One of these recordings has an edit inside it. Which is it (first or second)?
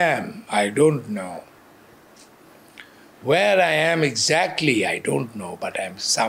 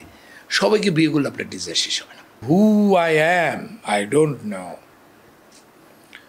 second